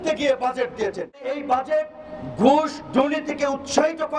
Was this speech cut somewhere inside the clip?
yes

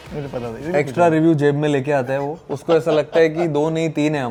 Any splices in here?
no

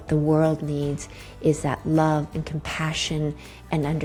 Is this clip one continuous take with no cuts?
yes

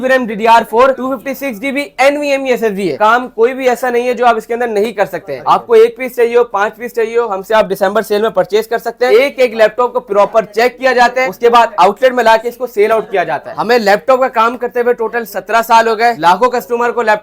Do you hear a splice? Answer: yes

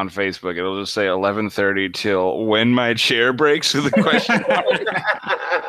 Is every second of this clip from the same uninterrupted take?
yes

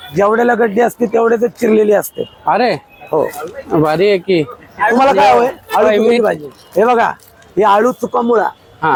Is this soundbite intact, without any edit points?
yes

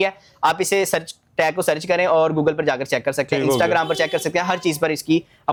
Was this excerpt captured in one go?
yes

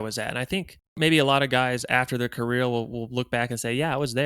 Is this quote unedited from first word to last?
no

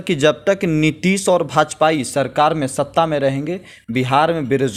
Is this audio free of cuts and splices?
yes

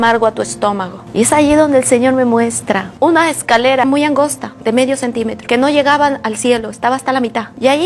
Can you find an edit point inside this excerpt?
yes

